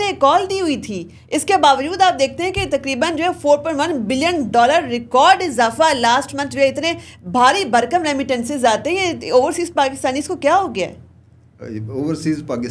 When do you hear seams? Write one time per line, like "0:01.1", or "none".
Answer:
none